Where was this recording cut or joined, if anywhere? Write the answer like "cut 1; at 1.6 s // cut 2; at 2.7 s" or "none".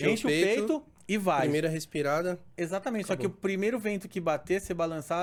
none